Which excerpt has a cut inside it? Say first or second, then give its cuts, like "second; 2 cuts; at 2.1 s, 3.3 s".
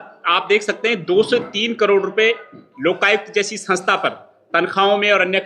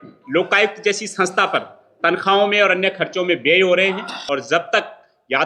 second; 1 cut; at 4.2 s